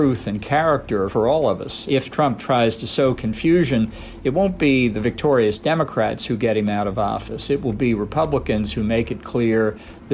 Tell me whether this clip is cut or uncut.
cut